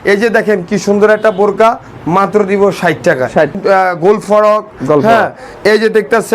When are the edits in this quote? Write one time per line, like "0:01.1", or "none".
0:03.5

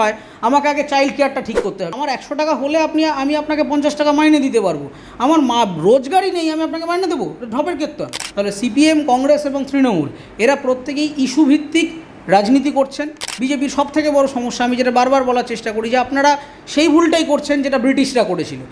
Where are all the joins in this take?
0:01.9
0:08.2
0:13.2

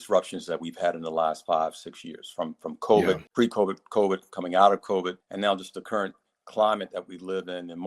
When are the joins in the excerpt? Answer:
0:03.3
0:05.2

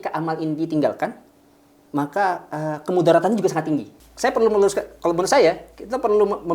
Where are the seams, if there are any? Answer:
0:04.0

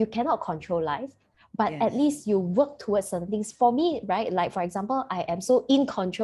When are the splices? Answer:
none

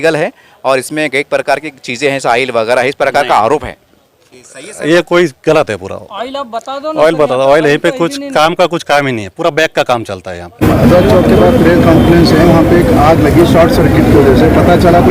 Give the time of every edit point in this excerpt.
0:10.6

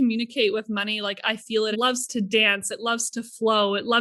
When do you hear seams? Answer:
none

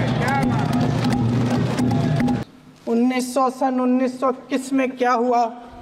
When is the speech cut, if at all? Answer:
0:02.5

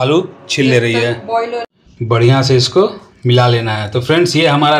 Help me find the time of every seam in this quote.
0:01.6

